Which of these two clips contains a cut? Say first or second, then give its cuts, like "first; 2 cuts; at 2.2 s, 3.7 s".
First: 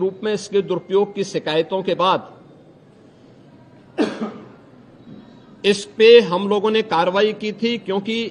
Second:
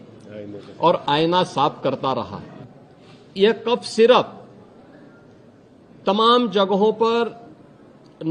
second; 1 cut; at 2.3 s